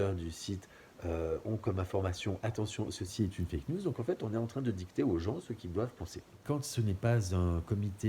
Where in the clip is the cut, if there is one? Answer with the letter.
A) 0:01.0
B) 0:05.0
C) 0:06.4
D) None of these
C